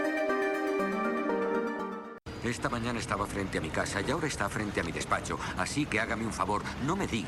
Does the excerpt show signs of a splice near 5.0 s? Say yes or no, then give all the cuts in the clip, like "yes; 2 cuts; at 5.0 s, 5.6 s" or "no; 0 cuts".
no; 1 cut; at 2.2 s